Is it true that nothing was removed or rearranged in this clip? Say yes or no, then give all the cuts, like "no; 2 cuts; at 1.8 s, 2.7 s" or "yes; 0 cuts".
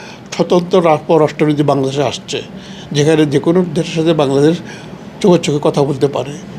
yes; 0 cuts